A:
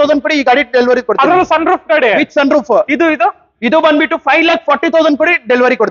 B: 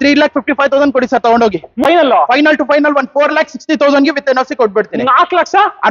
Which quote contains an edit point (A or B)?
B